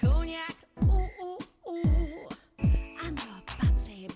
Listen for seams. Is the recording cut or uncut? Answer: uncut